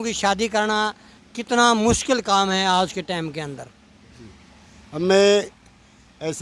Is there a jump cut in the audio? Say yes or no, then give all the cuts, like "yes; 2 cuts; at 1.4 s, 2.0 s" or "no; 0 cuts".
no; 0 cuts